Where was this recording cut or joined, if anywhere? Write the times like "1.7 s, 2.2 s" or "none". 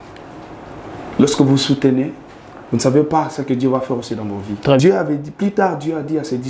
4.8 s